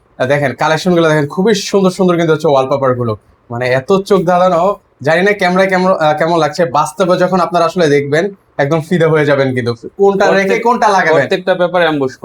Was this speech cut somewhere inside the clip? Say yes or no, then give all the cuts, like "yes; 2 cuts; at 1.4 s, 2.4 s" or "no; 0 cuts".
no; 0 cuts